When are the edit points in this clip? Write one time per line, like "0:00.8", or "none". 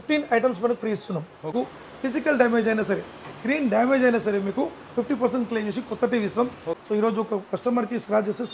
0:01.5
0:06.8